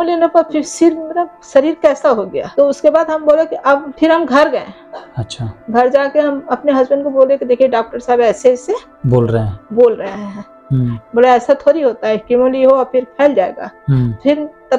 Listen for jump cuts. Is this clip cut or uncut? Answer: uncut